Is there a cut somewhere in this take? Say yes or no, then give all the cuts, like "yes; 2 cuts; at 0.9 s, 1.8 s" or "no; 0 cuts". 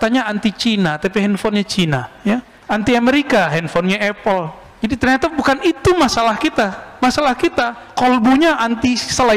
yes; 3 cuts; at 2.5 s, 4.6 s, 7.8 s